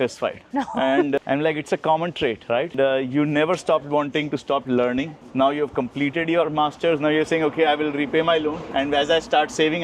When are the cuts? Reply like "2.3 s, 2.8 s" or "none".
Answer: none